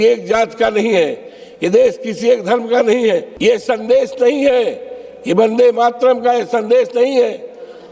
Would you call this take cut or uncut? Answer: cut